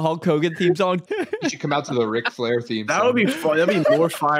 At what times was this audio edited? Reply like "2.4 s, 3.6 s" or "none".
1.0 s